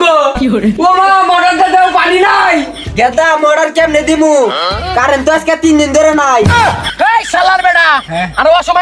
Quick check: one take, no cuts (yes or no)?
no